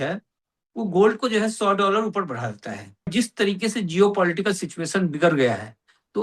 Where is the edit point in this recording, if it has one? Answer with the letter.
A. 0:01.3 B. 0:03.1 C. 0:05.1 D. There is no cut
B